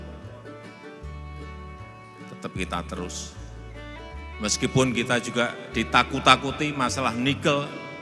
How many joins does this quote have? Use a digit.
0